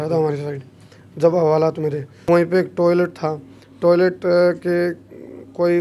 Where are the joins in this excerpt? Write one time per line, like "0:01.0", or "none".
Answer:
0:02.1